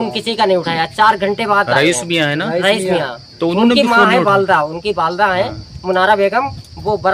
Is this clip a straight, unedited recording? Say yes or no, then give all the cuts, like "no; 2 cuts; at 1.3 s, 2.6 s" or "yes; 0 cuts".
yes; 0 cuts